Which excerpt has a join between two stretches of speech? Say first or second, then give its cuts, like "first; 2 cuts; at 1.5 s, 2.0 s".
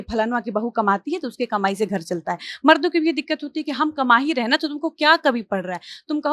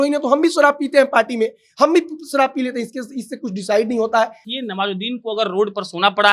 second; 1 cut; at 4.4 s